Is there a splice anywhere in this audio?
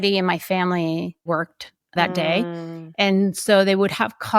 yes; 1 cut; at 1.3 s

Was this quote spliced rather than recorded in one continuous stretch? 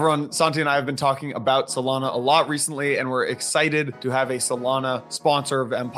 yes; 2 cuts; at 4.0 s, 5.1 s

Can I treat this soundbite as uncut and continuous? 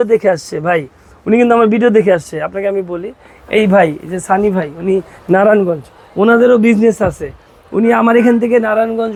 yes; 0 cuts

